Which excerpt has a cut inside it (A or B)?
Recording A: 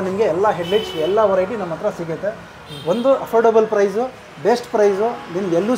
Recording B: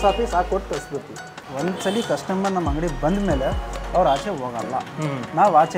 B